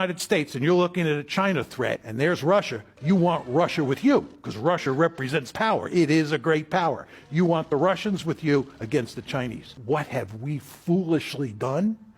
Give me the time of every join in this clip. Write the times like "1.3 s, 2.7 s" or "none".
2.0 s, 9.7 s